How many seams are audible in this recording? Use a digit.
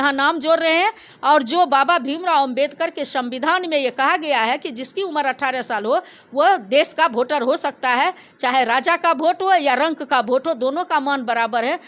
0